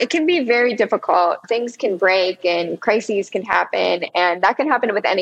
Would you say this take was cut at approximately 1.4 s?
yes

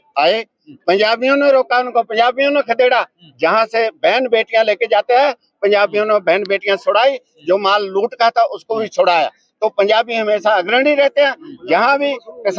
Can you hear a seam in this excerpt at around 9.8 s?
no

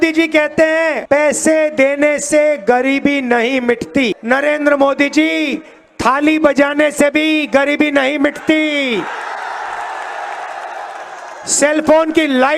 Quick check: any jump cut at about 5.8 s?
no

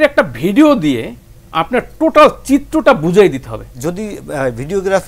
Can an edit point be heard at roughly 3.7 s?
yes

